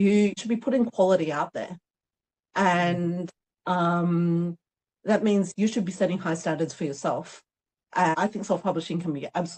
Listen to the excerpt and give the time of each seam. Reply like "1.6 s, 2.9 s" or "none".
8.2 s